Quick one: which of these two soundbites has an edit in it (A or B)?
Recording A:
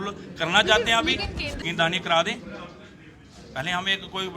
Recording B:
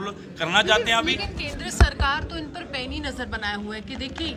A